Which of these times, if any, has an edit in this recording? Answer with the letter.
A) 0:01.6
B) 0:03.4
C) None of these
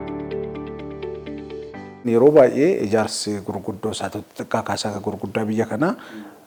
C